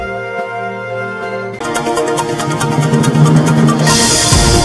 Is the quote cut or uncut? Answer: uncut